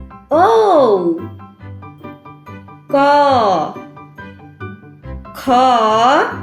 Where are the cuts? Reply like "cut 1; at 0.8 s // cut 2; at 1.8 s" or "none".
cut 1; at 1.3 s // cut 2; at 2.9 s